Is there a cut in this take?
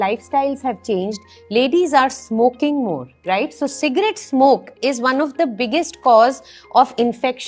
no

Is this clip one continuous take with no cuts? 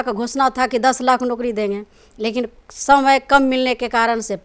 yes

